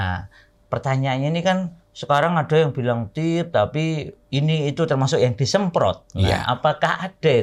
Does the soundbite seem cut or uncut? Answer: uncut